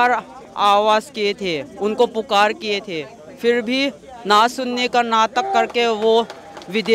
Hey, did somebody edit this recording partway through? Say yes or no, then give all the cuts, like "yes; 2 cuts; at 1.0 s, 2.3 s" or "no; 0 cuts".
no; 0 cuts